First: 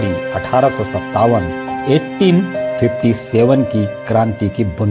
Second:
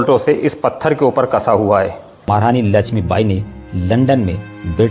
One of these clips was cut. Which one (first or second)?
second